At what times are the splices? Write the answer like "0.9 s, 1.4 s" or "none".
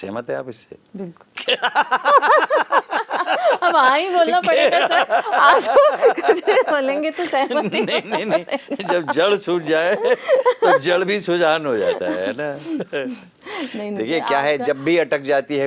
none